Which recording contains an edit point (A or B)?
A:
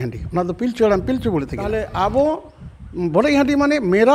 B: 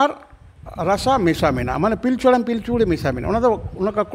A